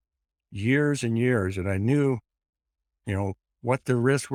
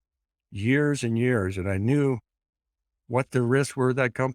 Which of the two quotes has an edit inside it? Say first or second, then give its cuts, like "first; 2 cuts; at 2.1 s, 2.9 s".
second; 1 cut; at 2.9 s